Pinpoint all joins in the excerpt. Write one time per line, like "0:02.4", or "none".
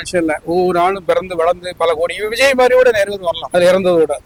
none